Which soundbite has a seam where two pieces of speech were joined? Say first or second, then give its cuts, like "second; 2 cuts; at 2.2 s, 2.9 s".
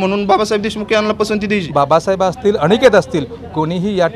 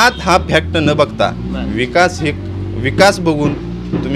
first; 1 cut; at 1.7 s